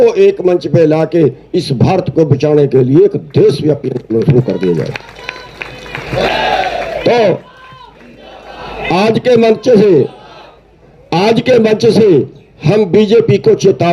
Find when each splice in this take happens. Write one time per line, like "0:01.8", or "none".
none